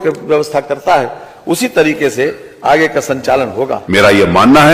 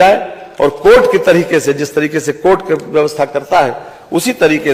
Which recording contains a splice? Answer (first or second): first